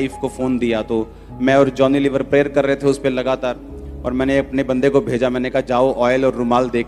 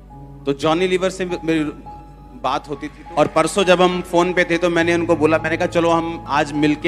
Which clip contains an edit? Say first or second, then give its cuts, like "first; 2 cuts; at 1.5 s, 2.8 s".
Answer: second; 1 cut; at 2.9 s